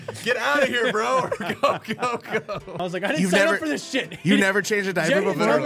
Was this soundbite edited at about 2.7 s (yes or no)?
yes